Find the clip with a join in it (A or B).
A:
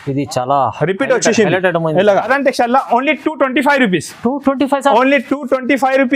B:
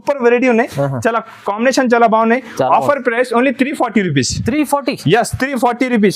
A